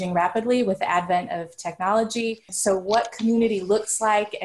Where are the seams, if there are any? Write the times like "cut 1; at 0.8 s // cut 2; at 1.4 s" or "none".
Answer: cut 1; at 2.5 s